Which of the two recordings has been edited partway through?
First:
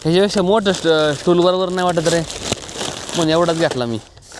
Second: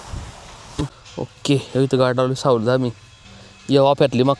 second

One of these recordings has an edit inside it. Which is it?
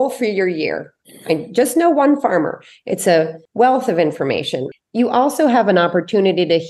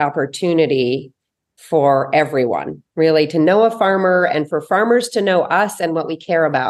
first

